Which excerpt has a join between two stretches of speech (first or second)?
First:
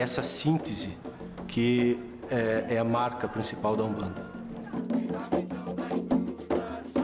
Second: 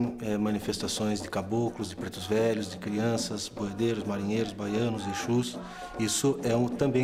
first